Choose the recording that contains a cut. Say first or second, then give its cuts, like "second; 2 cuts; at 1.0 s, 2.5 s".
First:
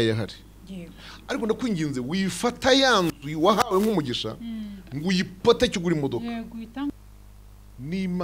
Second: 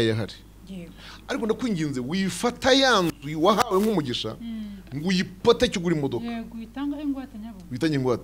first; 1 cut; at 6.9 s